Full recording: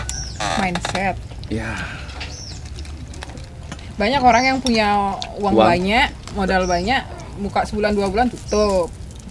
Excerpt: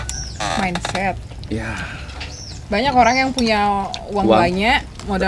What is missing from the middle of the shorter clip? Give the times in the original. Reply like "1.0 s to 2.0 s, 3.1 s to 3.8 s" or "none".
2.6 s to 3.9 s